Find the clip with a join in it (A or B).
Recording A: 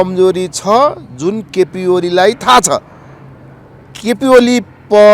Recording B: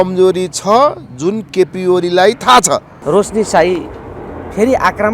B